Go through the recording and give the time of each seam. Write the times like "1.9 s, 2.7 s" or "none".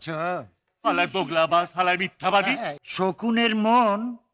2.8 s